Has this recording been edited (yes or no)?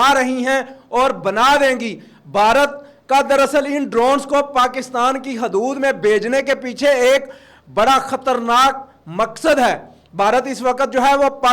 no